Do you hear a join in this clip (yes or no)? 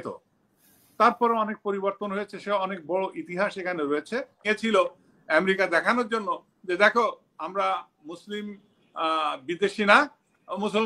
yes